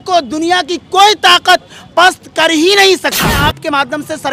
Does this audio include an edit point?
yes; 1 cut; at 3.4 s

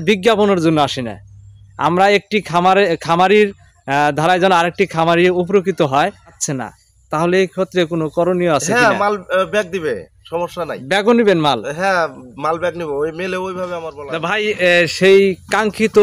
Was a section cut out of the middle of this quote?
yes; 2 cuts; at 6.4 s, 14.0 s

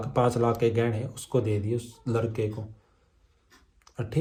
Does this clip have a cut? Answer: no; 0 cuts

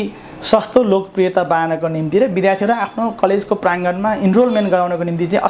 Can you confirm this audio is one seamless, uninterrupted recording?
yes; 0 cuts

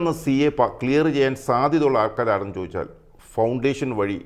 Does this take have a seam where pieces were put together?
no; 0 cuts

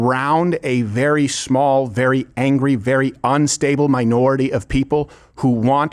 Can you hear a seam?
no; 0 cuts

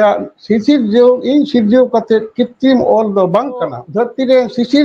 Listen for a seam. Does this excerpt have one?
yes; 1 cut; at 3.8 s

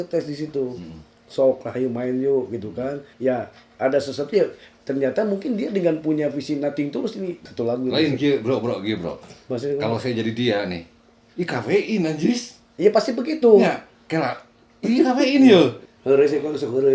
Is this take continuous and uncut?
no; 3 cuts; at 3.1 s, 7.5 s, 15.9 s

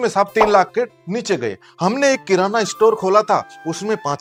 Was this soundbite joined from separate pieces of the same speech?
no; 0 cuts

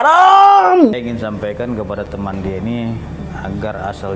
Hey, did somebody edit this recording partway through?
yes; 1 cut; at 1.0 s

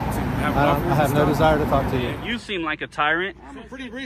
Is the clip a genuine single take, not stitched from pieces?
no; 1 cut; at 2.2 s

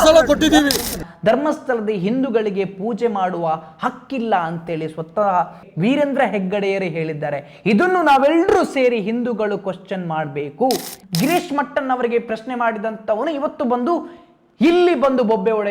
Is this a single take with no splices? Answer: no; 2 cuts; at 1.0 s, 11.0 s

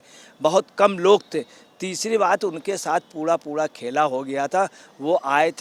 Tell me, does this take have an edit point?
no; 0 cuts

